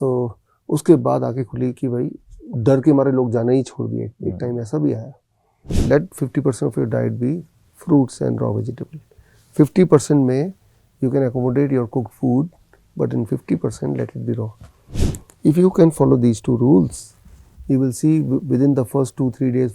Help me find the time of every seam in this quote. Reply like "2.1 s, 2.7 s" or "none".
5.7 s